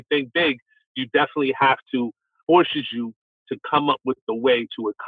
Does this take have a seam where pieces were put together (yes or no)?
no